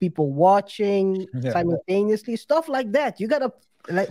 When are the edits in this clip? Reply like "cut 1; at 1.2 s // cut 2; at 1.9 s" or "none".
none